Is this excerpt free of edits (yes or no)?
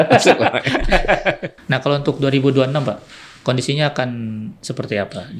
no